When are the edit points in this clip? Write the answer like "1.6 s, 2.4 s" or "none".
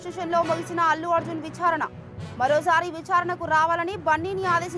none